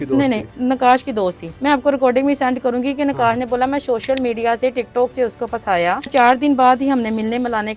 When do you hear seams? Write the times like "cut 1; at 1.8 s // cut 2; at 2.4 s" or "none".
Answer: cut 1; at 1.5 s // cut 2; at 6.1 s